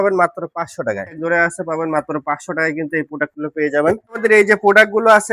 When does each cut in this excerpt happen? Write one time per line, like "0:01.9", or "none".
0:01.2
0:04.2